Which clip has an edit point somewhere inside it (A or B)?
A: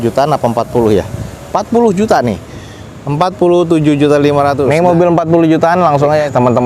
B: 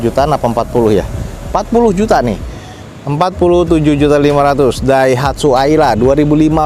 A